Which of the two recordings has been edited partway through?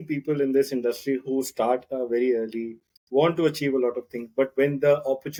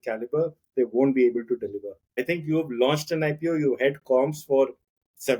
second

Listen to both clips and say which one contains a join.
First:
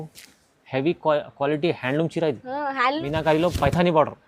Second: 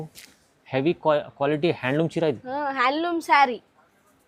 first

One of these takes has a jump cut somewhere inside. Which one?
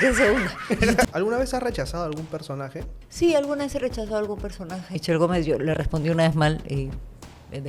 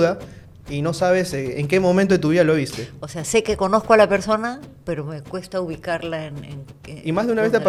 first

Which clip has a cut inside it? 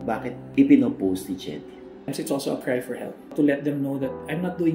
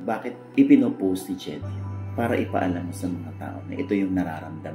first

